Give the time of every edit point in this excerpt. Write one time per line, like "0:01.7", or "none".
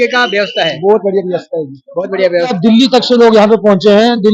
0:02.5